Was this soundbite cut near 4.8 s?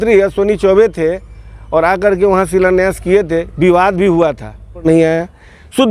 yes; 1 cut; at 4.8 s

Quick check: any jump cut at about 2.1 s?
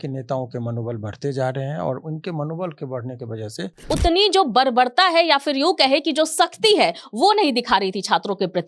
no; 1 cut; at 3.7 s

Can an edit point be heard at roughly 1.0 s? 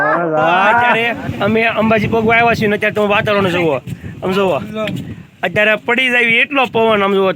yes; 1 cut; at 1.0 s

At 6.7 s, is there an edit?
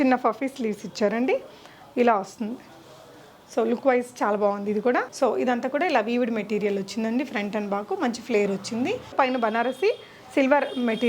no; 2 cuts; at 5.1 s, 9.1 s

